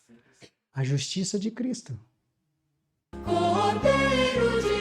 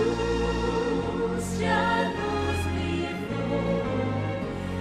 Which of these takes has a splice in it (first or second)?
first